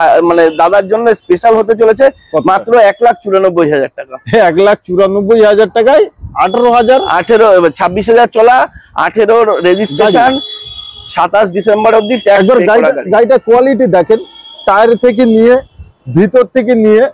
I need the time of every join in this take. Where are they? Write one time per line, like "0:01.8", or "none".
none